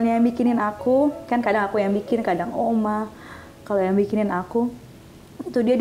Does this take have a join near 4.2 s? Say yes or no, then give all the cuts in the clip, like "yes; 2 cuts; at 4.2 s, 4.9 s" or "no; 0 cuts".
no; 0 cuts